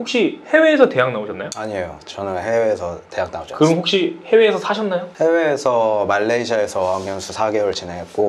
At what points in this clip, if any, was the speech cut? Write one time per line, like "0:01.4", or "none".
0:01.5